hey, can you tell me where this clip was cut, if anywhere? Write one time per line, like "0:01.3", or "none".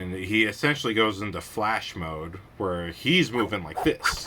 0:02.4